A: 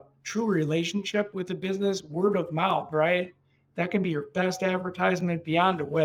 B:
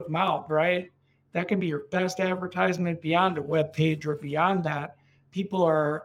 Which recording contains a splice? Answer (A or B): A